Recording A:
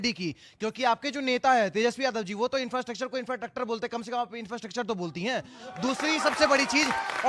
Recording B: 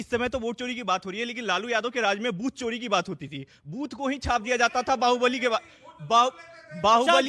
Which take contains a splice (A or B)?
A